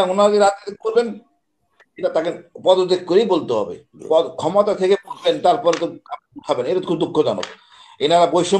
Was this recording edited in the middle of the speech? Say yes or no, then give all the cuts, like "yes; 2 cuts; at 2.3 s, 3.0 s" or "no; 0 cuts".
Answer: no; 0 cuts